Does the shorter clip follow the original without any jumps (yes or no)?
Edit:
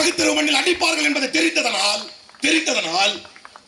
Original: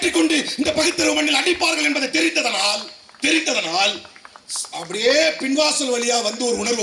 yes